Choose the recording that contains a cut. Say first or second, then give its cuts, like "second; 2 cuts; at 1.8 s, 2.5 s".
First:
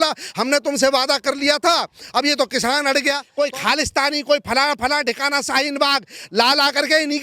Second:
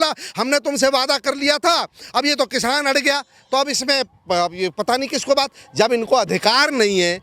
first; 1 cut; at 3.3 s